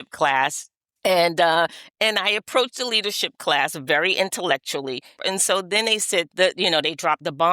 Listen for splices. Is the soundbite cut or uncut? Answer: cut